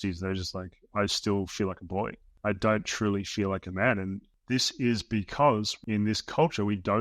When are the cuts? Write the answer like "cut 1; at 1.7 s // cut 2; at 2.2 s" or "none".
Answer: cut 1; at 2.2 s // cut 2; at 4.3 s // cut 3; at 5.8 s

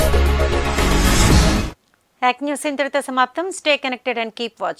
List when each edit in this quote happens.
none

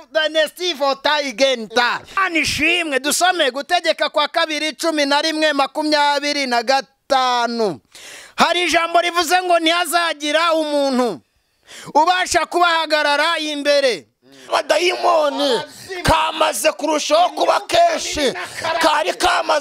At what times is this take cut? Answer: cut 1; at 2.2 s // cut 2; at 14.5 s

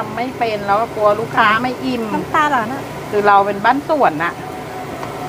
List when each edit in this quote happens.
none

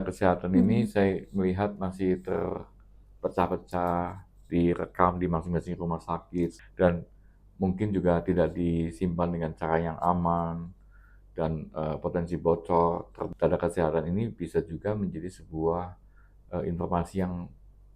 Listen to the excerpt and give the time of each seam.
cut 1; at 6.6 s // cut 2; at 13.2 s

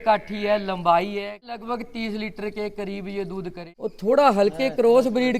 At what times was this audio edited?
cut 1; at 1.5 s // cut 2; at 3.6 s

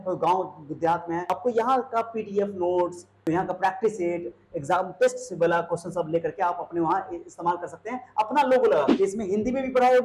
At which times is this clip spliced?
cut 1; at 1.3 s // cut 2; at 3.2 s // cut 3; at 8.9 s

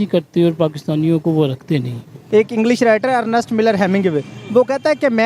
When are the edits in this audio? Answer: cut 1; at 2.1 s

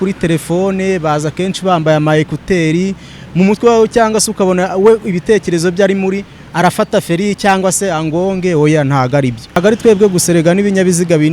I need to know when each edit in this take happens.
cut 1; at 9.6 s

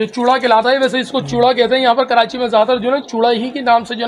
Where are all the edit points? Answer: none

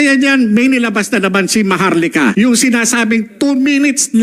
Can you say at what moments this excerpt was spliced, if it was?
cut 1; at 2.3 s

